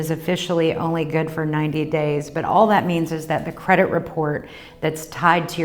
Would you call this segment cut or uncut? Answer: uncut